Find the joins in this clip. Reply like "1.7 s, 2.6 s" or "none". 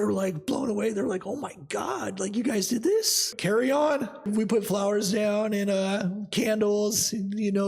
3.3 s, 4.3 s